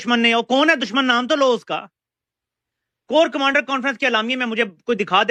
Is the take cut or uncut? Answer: uncut